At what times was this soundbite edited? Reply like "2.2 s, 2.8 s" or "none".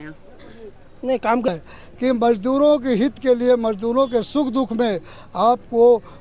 1.5 s

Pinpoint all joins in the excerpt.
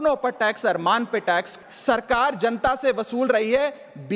1.5 s

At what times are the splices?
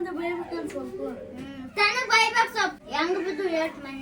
2.8 s

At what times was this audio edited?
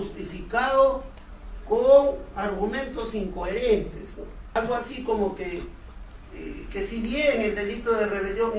4.6 s

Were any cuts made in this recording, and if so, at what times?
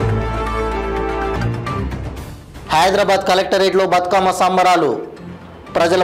1.3 s

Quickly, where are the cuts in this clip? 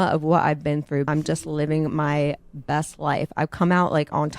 1.1 s

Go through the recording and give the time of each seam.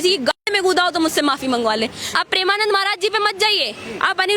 2.0 s

